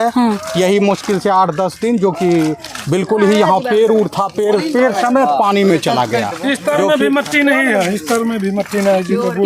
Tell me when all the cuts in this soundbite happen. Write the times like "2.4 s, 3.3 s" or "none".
none